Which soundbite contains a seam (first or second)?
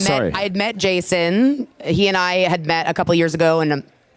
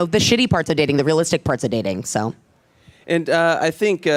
first